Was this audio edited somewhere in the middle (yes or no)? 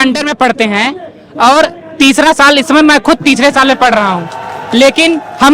no